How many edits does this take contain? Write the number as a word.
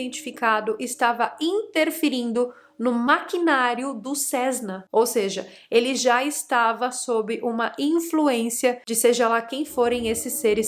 one